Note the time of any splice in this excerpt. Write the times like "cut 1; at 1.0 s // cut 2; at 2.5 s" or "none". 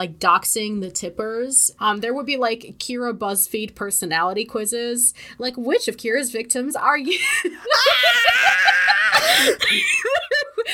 cut 1; at 1.6 s